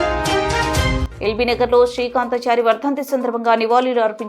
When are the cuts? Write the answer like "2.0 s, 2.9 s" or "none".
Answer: 1.0 s